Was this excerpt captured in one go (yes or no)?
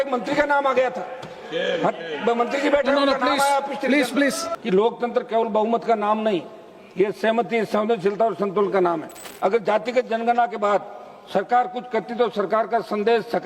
no